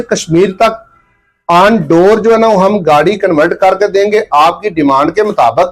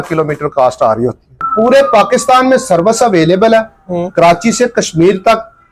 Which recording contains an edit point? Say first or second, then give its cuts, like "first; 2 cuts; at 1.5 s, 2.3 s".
second; 1 cut; at 1.4 s